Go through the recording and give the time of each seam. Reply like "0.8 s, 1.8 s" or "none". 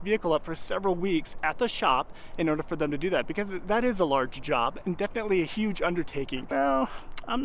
6.5 s